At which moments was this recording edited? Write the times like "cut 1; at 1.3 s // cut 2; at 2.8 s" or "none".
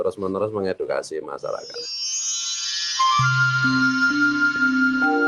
cut 1; at 1.9 s